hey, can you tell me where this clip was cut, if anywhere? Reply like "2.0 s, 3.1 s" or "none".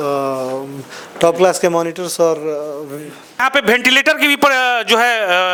none